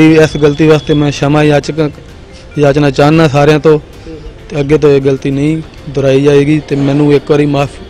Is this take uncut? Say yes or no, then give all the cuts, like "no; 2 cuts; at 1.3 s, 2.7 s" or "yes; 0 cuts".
yes; 0 cuts